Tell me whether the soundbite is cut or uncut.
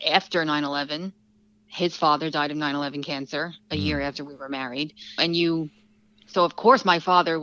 uncut